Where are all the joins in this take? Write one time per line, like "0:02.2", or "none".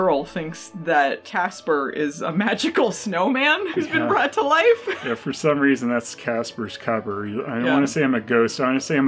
none

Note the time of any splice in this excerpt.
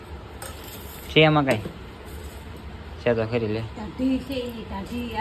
none

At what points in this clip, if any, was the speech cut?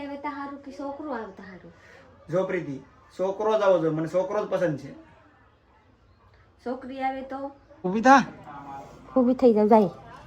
0:07.8

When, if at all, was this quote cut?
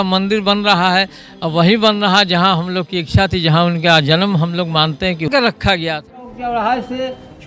0:05.3

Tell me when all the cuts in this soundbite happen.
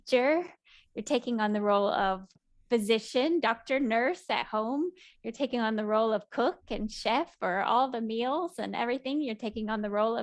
none

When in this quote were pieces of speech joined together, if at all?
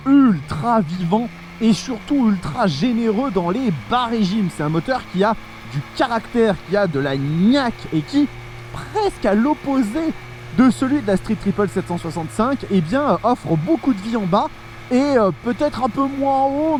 none

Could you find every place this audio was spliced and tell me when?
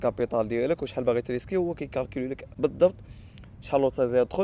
0:02.4

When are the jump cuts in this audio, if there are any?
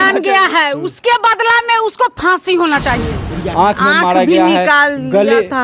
0:03.3

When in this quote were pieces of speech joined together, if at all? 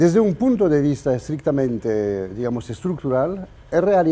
0:02.7

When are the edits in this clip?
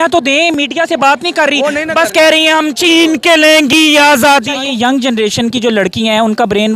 0:04.5

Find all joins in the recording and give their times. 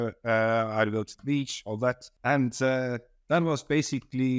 0:02.1

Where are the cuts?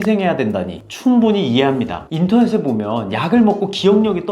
0:02.0

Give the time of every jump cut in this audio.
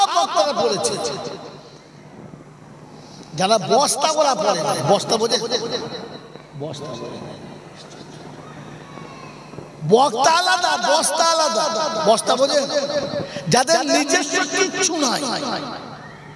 none

